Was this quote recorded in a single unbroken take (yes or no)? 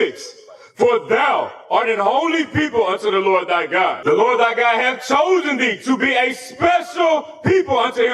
no